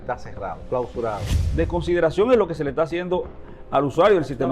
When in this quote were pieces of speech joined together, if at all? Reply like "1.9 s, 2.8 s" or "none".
1.4 s

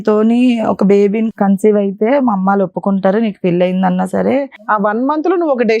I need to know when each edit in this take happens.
1.3 s, 4.7 s

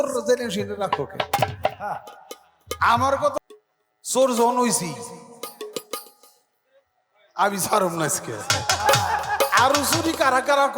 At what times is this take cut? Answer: 3.3 s

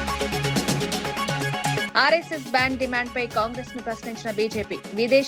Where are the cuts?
1.8 s

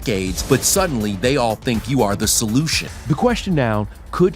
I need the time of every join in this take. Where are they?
2.8 s

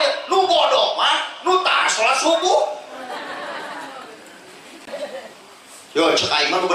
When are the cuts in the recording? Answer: 4.8 s

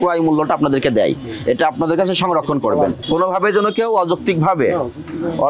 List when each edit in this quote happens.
3.0 s

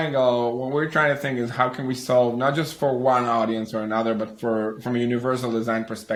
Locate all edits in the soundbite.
none

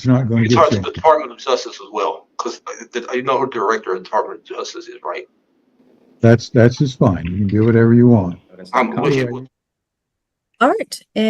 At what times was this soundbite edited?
9.3 s

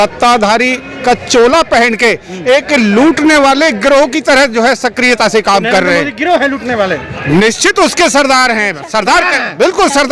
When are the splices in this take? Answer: none

